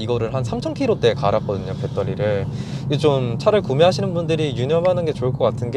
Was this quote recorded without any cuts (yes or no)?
yes